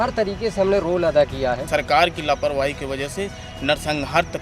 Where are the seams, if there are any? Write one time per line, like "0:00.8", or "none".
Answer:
0:01.6